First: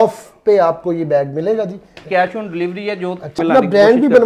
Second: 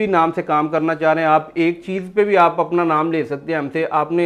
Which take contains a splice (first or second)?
first